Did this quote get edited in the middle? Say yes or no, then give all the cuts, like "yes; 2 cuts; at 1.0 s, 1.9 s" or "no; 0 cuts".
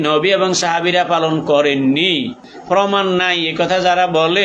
yes; 1 cut; at 2.5 s